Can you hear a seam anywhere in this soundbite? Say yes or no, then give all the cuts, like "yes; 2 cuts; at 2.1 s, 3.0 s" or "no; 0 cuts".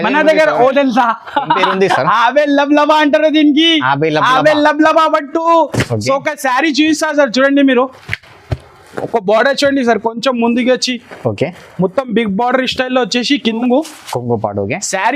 yes; 2 cuts; at 0.7 s, 13.6 s